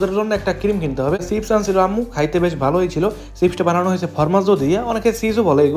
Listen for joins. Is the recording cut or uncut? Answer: cut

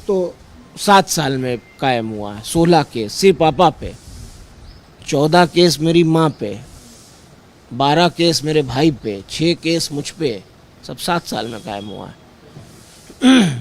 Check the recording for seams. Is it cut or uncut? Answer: uncut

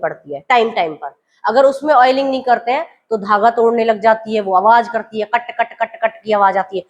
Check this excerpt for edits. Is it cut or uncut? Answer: uncut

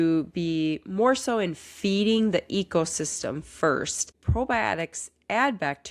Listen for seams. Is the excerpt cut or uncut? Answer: uncut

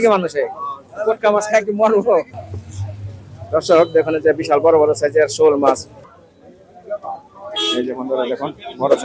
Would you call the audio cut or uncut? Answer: cut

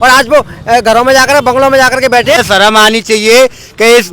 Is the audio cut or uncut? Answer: cut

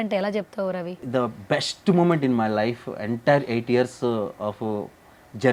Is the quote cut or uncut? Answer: uncut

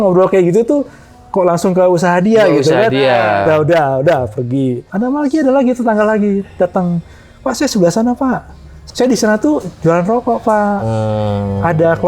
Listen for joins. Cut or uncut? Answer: cut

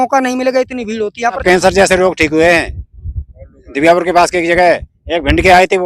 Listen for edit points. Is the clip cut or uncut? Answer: cut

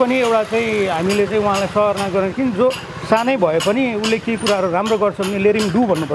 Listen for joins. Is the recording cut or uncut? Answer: uncut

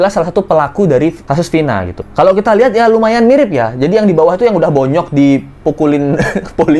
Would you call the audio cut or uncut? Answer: uncut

